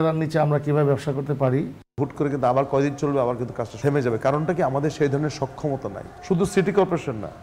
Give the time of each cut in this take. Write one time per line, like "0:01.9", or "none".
0:01.8
0:03.7
0:06.1